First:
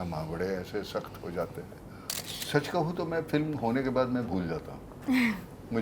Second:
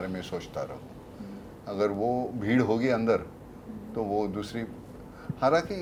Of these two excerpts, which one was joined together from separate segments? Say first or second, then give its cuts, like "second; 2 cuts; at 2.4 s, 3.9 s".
first; 1 cut; at 2.0 s